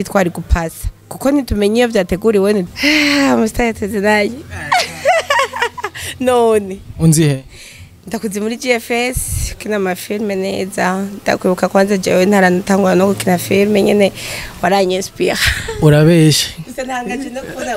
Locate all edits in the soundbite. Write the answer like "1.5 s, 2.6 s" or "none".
2.7 s